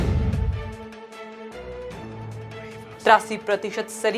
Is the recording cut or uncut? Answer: uncut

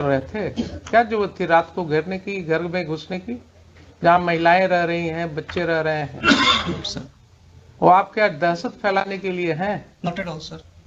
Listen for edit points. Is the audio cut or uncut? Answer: uncut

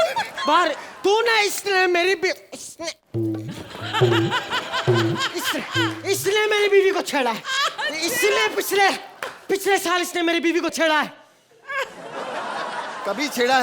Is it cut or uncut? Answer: uncut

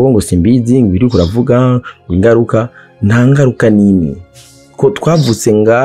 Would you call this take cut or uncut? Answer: uncut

